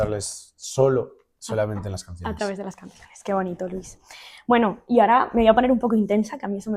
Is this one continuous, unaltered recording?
yes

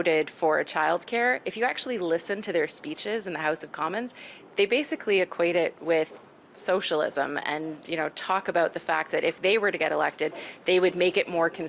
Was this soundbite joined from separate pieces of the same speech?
no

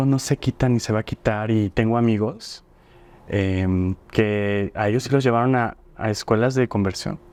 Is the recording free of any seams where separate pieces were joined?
yes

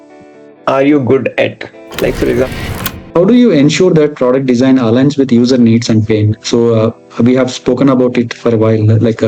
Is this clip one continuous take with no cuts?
no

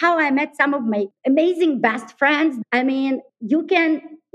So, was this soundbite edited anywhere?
yes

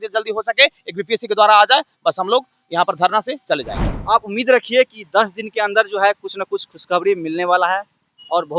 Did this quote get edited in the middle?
yes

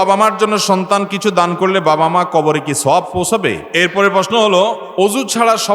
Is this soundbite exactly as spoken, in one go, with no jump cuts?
no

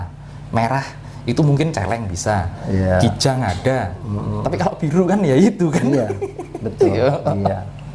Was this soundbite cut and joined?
no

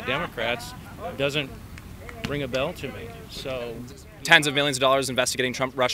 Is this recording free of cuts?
yes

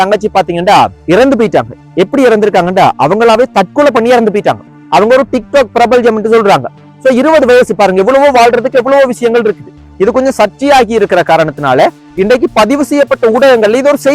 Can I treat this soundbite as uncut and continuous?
no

